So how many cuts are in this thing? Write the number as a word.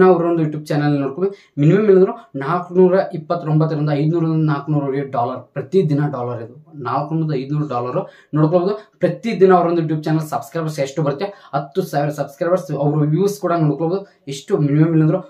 zero